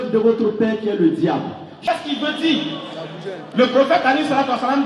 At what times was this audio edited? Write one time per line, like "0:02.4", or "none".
0:01.7